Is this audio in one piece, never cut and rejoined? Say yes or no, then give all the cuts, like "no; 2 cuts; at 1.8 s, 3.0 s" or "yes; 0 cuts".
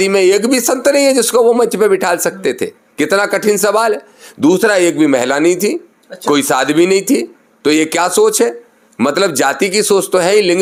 yes; 0 cuts